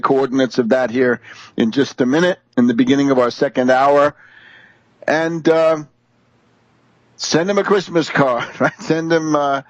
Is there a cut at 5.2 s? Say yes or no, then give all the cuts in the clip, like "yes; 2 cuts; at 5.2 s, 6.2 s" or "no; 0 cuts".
yes; 1 cut; at 5.2 s